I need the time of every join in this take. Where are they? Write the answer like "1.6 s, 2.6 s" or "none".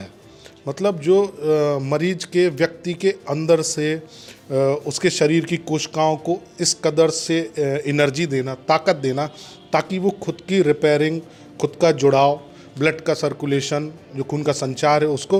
none

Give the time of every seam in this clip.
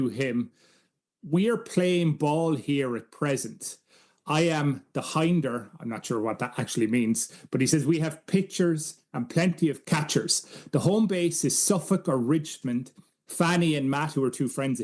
9.8 s, 12.6 s

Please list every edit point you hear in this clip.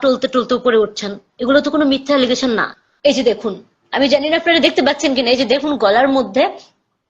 2.8 s

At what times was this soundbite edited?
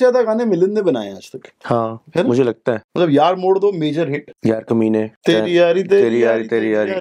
2.9 s, 4.3 s, 5.1 s

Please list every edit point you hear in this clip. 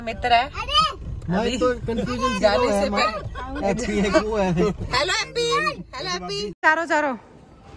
6.6 s

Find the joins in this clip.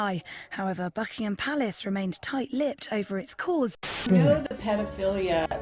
4.0 s

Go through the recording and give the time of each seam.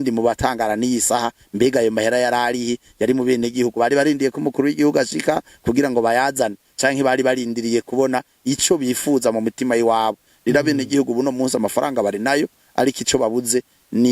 none

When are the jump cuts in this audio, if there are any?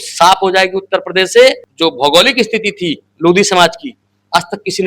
1.7 s

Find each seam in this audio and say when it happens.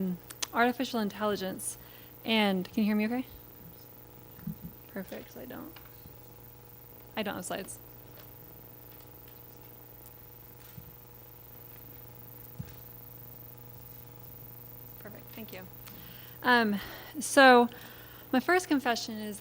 4.5 s

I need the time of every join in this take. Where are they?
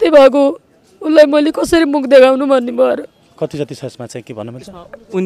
3.3 s

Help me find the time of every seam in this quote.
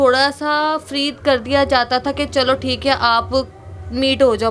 none

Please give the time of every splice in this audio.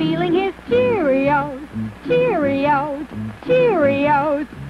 2.9 s

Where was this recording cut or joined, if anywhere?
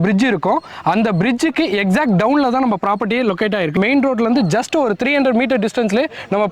3.7 s

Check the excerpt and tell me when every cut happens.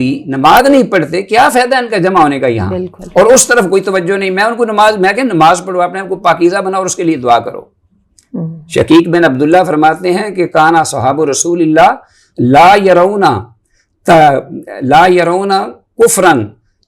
none

